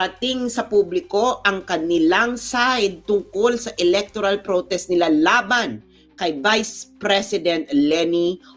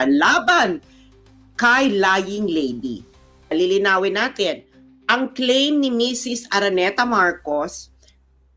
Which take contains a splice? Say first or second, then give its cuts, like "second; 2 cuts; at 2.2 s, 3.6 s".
second; 1 cut; at 3.5 s